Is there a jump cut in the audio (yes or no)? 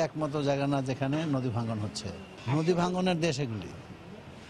no